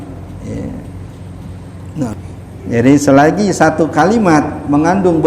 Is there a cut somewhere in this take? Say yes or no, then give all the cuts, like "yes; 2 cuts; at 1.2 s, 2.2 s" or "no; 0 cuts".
yes; 1 cut; at 2.2 s